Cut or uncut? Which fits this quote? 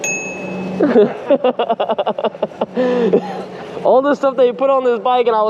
uncut